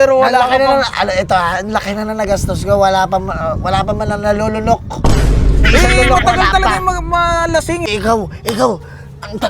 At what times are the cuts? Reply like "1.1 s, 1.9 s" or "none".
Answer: 7.9 s